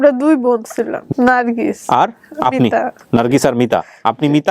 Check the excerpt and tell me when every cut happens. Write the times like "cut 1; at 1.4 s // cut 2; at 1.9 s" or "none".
cut 1; at 1.0 s